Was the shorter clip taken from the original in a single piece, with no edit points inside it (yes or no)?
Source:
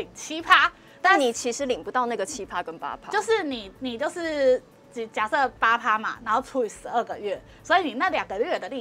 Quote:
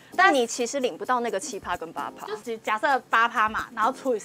no